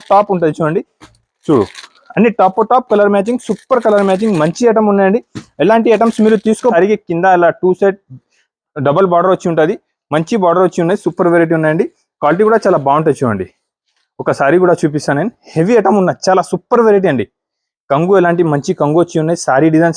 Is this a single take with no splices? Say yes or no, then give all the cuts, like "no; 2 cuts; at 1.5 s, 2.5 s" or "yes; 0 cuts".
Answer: no; 1 cut; at 6.7 s